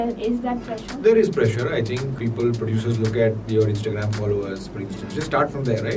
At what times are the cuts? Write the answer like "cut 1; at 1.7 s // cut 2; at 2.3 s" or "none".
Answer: cut 1; at 2.1 s